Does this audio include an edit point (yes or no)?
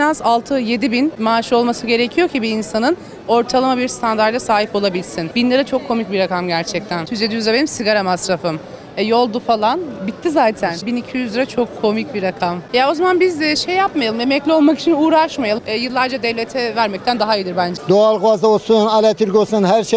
yes